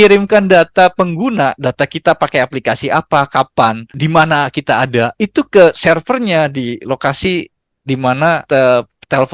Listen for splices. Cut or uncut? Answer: cut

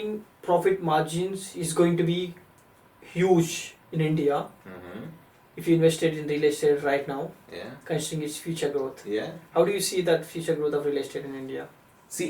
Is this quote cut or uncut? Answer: uncut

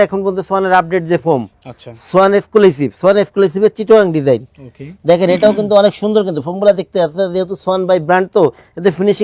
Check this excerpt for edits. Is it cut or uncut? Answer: uncut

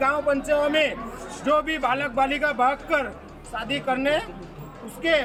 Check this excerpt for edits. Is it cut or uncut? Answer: uncut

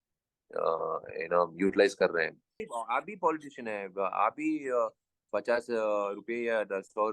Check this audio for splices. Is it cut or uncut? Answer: cut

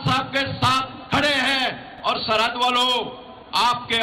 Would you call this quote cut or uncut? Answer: uncut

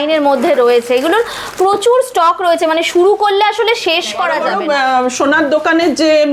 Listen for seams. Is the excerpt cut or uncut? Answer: cut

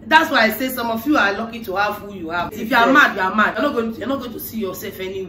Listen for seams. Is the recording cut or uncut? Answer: cut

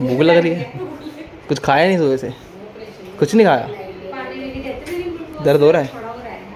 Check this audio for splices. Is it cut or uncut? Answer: uncut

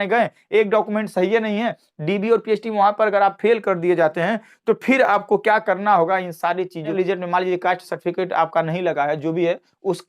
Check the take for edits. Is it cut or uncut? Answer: cut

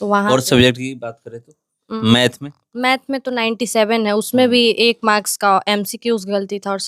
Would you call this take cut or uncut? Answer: uncut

